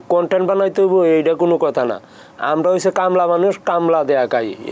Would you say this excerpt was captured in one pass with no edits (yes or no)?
yes